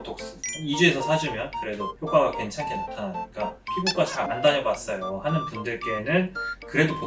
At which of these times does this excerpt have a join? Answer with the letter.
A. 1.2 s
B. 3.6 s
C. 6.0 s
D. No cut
B